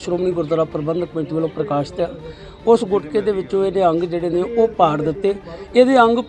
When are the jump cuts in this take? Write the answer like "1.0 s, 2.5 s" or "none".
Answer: none